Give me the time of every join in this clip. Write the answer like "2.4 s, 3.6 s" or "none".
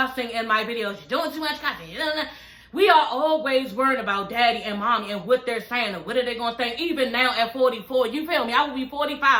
none

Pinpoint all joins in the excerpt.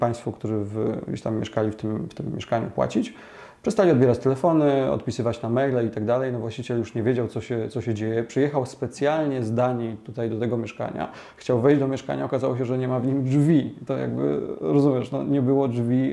none

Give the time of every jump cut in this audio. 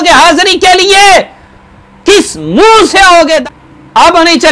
3.4 s

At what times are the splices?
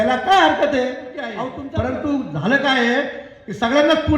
1.5 s

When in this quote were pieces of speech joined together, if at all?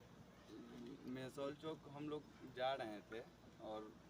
none

